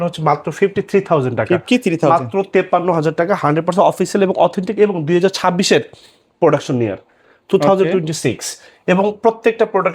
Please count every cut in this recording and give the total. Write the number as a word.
zero